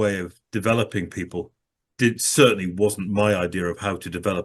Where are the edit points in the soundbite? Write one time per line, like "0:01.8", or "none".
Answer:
none